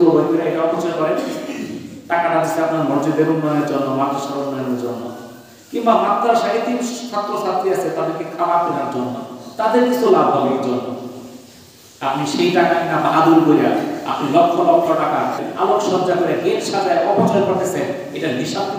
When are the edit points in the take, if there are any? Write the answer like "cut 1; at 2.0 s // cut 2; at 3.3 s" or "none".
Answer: cut 1; at 15.4 s

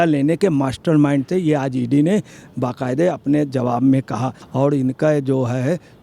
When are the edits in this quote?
cut 1; at 4.4 s

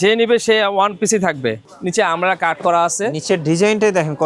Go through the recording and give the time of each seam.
cut 1; at 1.7 s

